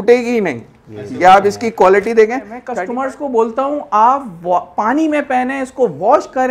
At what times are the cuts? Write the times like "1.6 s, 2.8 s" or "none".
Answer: 2.6 s